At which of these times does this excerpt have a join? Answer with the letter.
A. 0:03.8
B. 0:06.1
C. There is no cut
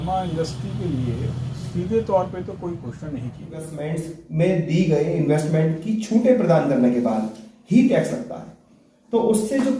A